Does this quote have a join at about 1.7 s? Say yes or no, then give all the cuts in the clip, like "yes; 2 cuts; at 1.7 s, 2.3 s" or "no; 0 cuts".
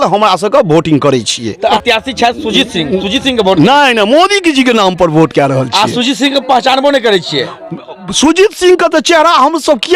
yes; 1 cut; at 1.7 s